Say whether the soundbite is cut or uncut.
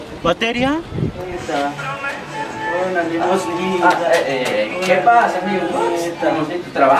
cut